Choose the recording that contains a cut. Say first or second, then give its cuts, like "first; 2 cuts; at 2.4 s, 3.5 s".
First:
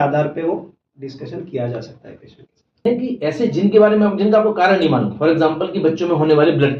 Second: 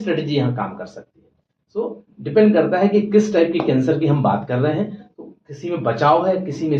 first; 1 cut; at 2.8 s